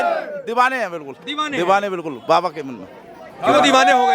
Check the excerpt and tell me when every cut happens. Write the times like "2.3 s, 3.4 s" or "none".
none